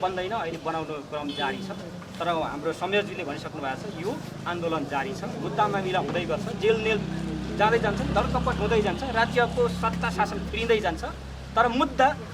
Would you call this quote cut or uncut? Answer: uncut